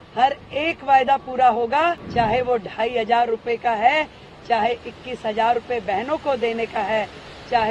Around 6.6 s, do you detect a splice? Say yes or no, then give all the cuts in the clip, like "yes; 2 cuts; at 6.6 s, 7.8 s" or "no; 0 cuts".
no; 1 cut; at 2.0 s